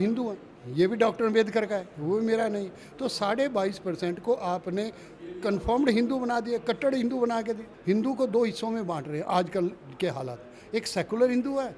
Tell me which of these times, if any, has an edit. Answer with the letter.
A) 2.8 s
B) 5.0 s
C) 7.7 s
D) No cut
C